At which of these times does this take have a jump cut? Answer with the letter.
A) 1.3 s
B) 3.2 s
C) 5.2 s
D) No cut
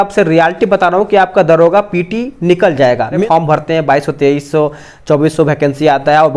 B